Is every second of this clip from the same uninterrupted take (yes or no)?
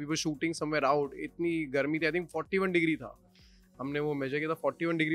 yes